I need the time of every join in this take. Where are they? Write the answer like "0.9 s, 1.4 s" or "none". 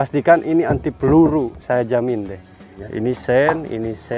2.8 s